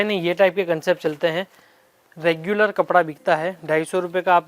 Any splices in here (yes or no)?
no